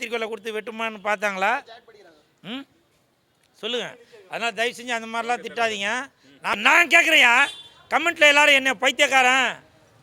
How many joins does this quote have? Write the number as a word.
one